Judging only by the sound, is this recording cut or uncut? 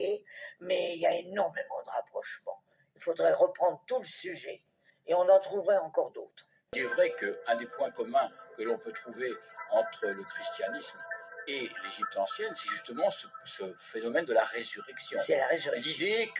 cut